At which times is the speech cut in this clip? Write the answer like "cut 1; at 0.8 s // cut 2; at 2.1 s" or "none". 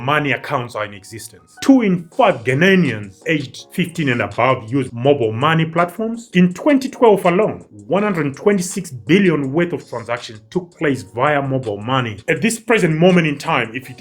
cut 1; at 12.1 s